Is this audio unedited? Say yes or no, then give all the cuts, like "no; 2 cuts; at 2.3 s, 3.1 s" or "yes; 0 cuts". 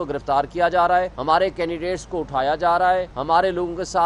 no; 2 cuts; at 1.2 s, 3.1 s